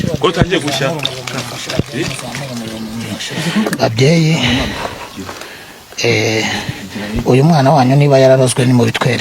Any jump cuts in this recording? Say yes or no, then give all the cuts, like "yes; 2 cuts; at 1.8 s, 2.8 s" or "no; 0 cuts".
yes; 1 cut; at 3.3 s